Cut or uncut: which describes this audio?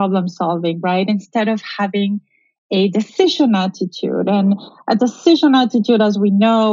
uncut